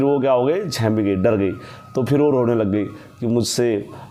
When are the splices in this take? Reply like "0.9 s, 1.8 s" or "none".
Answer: none